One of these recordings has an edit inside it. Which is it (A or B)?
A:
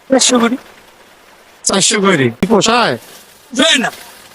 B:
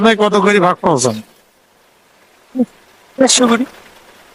A